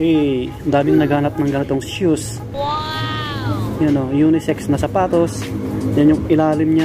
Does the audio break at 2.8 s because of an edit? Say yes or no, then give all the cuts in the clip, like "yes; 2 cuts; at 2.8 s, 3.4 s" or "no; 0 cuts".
no; 0 cuts